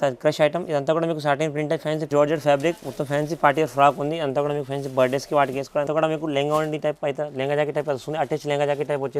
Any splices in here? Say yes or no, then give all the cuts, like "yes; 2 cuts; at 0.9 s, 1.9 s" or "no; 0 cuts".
yes; 2 cuts; at 2.1 s, 5.9 s